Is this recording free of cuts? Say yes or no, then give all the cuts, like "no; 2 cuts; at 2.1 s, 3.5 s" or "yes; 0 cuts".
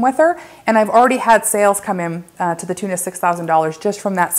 yes; 0 cuts